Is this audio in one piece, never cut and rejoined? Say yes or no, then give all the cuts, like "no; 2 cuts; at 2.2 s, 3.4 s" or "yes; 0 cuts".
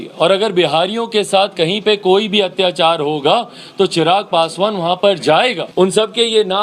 no; 1 cut; at 5.6 s